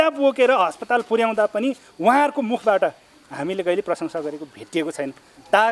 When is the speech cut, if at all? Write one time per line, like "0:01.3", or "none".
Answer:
none